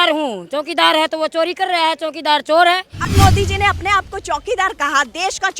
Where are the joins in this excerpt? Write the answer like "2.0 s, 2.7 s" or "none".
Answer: 3.1 s